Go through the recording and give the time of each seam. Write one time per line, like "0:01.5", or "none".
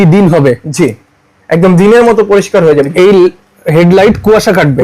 0:02.9